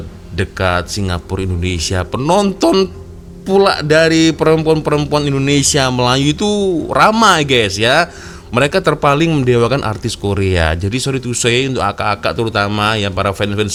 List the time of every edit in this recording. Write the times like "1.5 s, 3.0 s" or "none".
none